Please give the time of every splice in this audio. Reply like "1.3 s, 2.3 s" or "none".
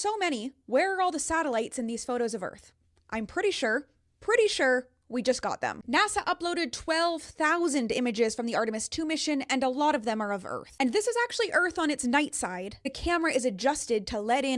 1.2 s

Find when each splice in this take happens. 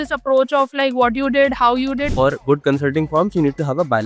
2.1 s

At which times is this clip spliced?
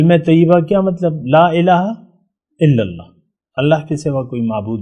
none

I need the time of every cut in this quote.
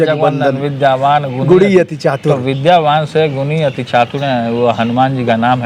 none

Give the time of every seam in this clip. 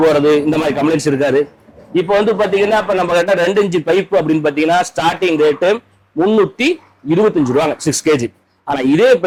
none

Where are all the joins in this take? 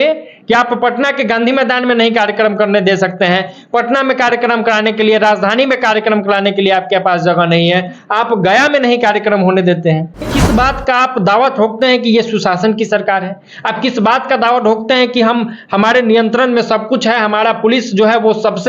10.3 s

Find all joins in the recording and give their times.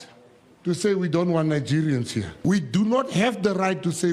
2.3 s

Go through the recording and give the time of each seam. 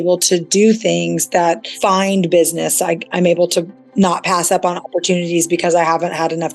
1.7 s

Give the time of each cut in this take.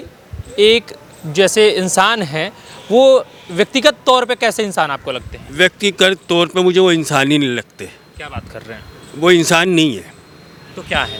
none

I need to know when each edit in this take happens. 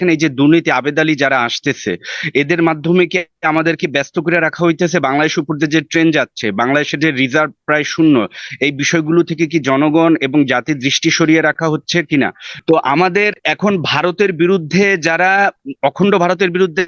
12.5 s

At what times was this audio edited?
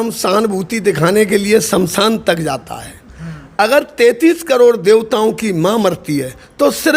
none

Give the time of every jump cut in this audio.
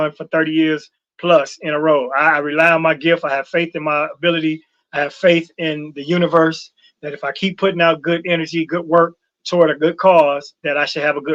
none

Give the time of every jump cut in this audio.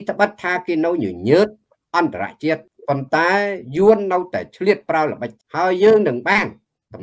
2.7 s, 5.3 s

